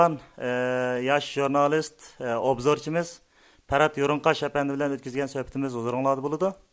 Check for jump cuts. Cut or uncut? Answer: uncut